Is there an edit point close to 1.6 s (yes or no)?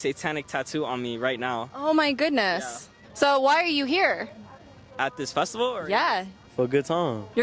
no